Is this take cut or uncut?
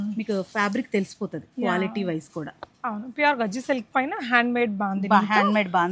uncut